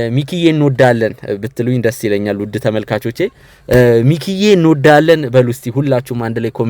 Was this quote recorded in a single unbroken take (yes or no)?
yes